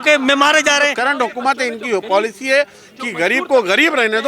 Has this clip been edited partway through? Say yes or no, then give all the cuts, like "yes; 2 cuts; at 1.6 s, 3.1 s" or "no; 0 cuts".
yes; 1 cut; at 1.0 s